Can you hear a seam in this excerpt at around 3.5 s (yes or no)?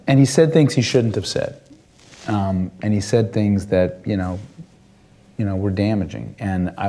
no